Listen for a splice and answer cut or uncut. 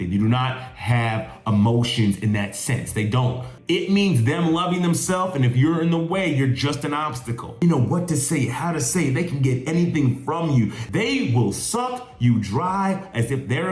cut